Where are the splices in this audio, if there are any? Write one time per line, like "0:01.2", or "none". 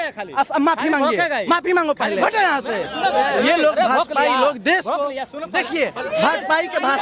0:02.2